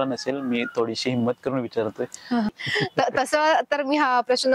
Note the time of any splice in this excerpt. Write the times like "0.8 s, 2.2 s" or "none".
2.5 s